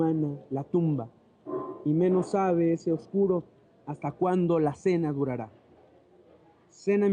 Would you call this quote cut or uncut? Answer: uncut